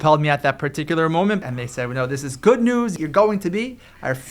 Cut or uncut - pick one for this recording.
cut